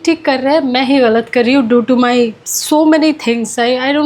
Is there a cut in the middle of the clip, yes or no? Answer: no